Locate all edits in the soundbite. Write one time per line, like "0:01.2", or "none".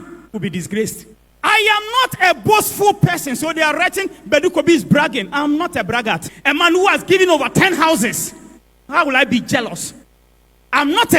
0:06.3